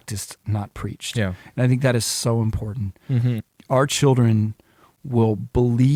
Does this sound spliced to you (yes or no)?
no